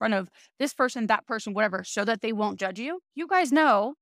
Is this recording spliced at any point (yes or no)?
yes